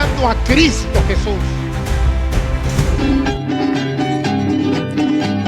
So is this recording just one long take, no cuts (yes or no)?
no